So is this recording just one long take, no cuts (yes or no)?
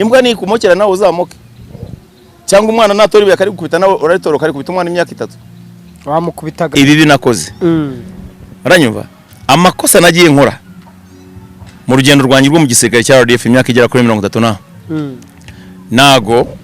no